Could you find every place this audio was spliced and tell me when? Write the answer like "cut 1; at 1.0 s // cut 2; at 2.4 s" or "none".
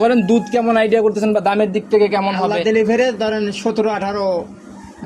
none